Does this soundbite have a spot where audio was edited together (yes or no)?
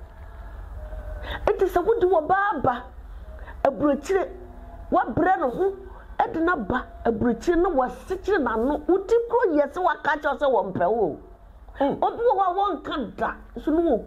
no